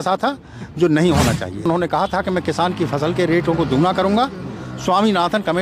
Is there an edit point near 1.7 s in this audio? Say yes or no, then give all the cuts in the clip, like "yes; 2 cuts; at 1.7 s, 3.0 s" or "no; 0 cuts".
yes; 1 cut; at 1.7 s